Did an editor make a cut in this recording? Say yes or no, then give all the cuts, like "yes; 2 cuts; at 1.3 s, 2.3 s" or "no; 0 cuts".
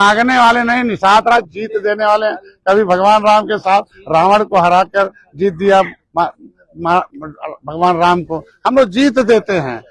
no; 0 cuts